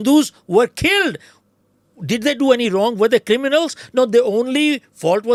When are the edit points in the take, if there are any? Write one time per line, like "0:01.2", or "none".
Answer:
none